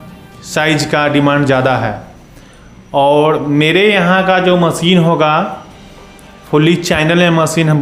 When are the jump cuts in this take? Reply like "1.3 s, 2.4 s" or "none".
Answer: none

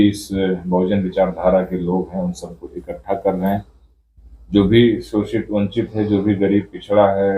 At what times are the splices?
none

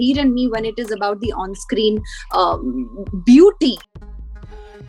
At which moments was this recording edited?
3.9 s

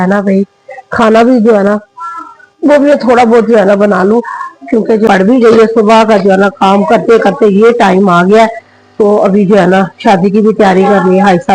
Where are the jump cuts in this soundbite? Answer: 5.0 s

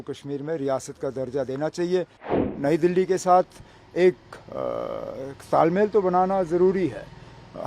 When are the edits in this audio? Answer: 2.4 s

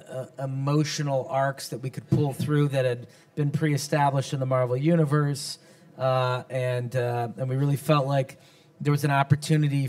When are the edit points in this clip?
1.6 s

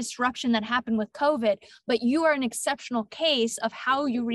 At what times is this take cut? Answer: none

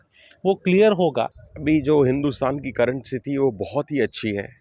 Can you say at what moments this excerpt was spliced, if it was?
1.4 s

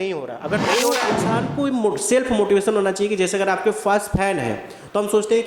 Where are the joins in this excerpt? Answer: 1.1 s

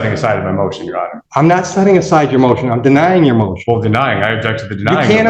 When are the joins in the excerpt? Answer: 1.2 s

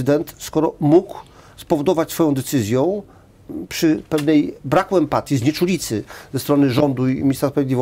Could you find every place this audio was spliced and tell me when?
none

